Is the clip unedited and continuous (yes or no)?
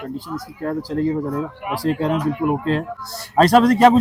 yes